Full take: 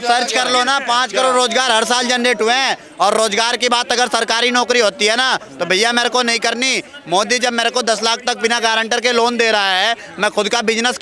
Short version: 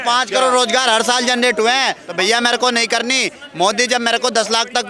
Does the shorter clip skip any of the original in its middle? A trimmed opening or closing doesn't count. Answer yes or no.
yes